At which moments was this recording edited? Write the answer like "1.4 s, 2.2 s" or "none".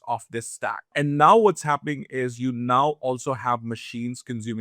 0.9 s